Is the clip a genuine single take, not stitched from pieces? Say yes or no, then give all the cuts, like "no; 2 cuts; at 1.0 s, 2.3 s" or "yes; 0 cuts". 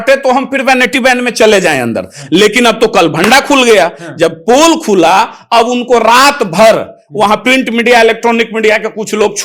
yes; 0 cuts